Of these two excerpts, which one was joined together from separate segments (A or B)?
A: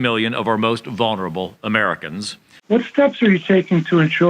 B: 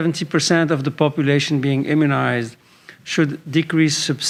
A